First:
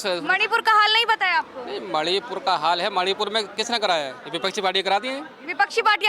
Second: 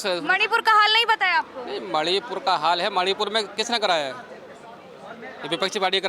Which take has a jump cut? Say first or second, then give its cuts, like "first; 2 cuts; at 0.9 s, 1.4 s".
first; 1 cut; at 4.2 s